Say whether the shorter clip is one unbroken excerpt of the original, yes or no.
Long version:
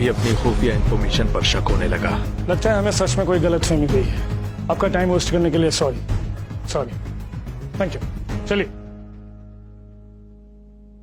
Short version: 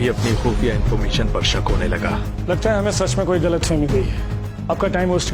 yes